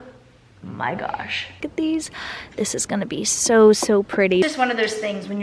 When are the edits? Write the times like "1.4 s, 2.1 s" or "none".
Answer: 1.6 s, 4.5 s